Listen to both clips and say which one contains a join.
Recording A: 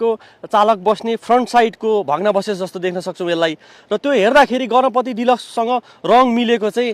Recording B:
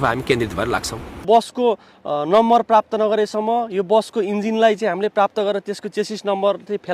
B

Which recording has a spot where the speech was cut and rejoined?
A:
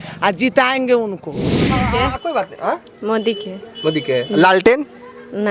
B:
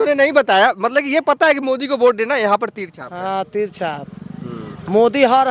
A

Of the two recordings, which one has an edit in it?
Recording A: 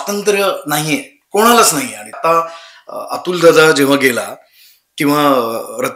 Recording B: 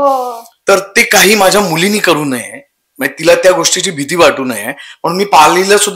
A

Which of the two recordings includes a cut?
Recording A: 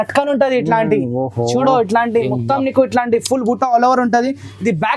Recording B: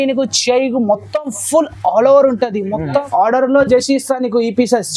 B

